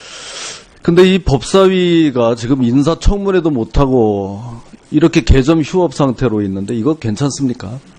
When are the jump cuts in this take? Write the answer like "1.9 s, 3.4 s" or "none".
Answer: none